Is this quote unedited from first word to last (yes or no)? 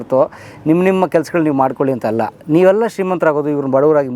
yes